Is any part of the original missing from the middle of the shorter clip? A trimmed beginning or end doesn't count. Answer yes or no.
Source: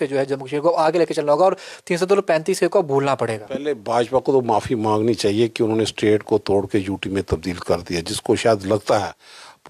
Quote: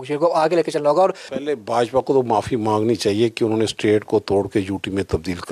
yes